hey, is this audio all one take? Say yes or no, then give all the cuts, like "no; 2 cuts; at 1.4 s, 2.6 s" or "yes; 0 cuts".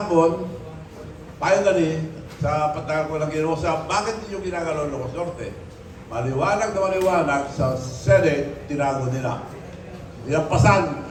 yes; 0 cuts